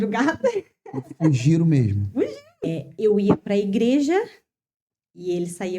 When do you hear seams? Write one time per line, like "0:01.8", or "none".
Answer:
0:02.9